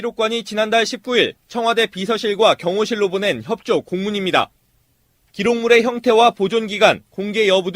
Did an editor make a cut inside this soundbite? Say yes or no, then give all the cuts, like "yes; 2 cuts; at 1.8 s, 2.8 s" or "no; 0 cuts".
yes; 1 cut; at 6.0 s